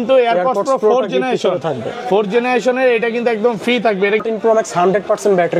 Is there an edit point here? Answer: yes; 1 cut; at 4.3 s

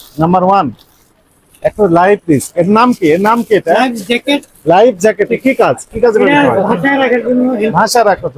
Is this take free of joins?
yes; 0 cuts

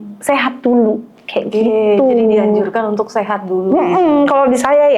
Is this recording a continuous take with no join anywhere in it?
yes; 0 cuts

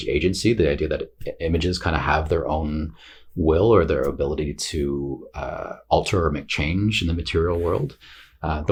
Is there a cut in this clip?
no; 0 cuts

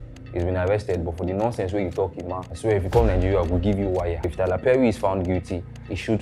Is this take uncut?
no; 2 cuts; at 2.4 s, 4.3 s

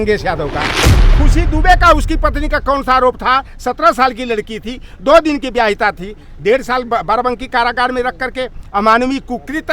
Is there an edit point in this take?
yes; 1 cut; at 1.0 s

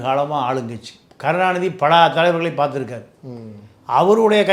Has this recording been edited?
no; 0 cuts

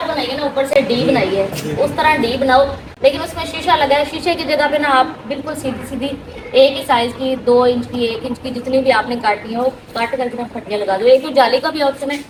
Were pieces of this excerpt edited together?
no; 0 cuts

